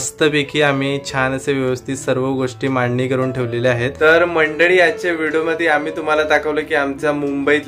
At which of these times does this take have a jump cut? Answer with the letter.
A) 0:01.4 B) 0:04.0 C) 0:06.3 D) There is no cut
D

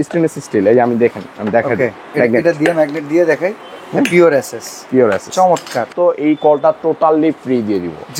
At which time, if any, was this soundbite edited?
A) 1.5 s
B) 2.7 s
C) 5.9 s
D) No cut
C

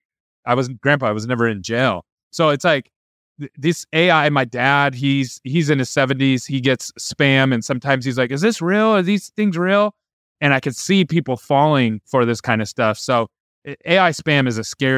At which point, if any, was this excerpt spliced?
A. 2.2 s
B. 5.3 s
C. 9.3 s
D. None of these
D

